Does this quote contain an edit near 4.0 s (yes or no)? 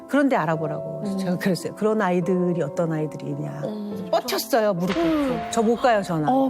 yes